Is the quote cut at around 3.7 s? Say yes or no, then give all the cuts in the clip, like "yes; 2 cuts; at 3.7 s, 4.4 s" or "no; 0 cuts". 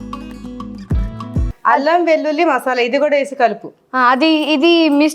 no; 1 cut; at 1.5 s